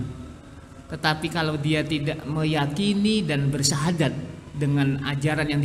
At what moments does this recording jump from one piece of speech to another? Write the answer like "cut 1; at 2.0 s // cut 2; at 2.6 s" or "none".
none